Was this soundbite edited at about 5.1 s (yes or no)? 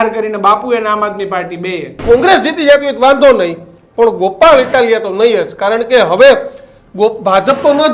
no